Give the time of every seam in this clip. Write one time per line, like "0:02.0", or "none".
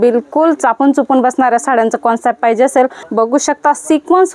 0:03.0